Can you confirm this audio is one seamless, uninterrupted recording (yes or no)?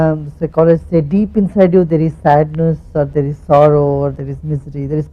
no